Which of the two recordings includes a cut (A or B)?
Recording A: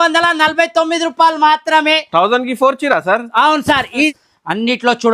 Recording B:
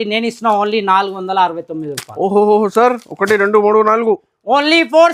A